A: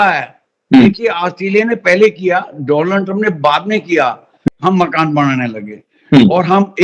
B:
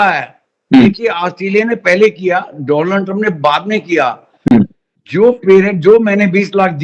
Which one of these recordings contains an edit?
A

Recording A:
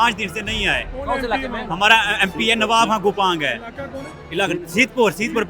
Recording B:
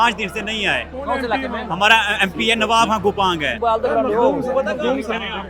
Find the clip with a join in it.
B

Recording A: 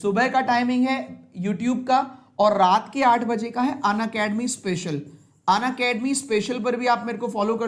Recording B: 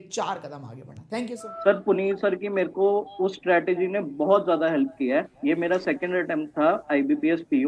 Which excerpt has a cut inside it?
B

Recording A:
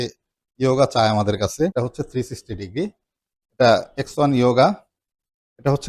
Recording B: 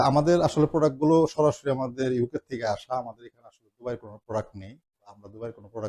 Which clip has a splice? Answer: A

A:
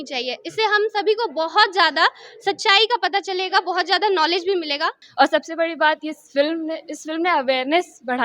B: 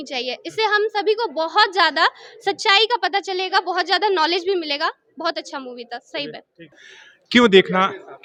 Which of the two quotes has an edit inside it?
A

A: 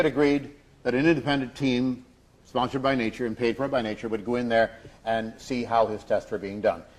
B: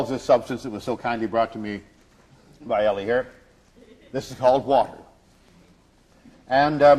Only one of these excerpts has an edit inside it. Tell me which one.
A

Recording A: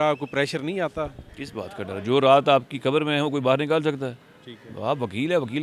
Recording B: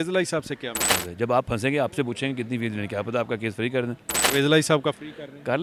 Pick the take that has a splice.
B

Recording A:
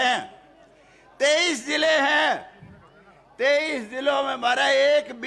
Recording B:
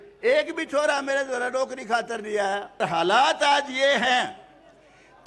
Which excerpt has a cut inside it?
B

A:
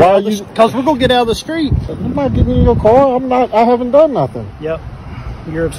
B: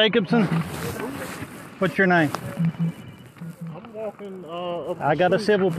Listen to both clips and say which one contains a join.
A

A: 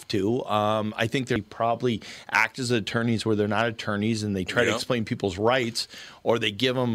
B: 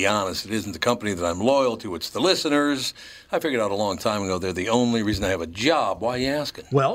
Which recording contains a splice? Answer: A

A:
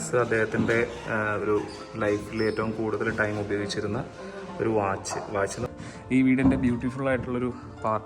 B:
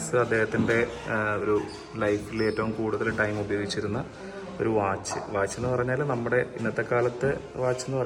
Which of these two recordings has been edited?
A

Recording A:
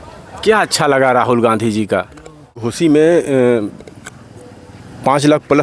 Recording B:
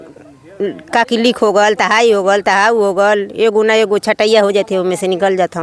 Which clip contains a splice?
A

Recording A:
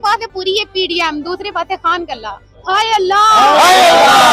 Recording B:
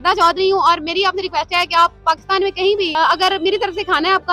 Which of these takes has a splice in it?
B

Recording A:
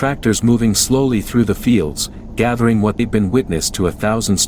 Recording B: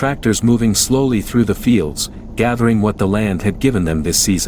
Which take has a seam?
A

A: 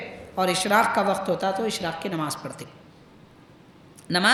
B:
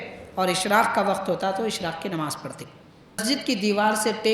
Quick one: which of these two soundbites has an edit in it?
B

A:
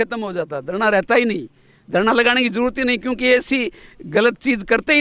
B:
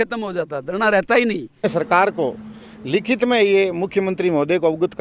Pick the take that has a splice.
B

